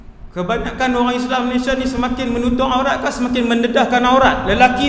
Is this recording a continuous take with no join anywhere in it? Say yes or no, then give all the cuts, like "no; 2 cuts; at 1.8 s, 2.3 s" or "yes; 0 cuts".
yes; 0 cuts